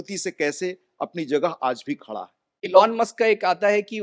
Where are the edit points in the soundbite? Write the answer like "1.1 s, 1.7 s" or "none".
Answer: 2.6 s